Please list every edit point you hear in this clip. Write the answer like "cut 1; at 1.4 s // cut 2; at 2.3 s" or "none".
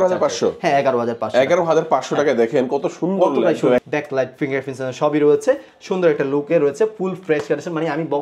cut 1; at 3.8 s